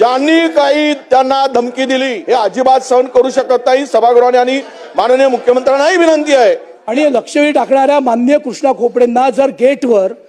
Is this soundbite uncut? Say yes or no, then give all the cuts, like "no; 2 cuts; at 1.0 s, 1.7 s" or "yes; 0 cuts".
no; 2 cuts; at 2.1 s, 6.7 s